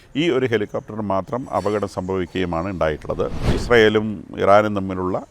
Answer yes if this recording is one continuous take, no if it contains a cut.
no